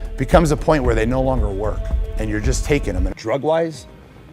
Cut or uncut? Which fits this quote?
cut